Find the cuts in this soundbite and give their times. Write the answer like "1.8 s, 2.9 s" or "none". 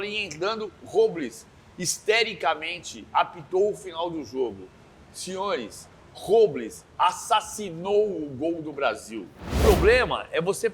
9.6 s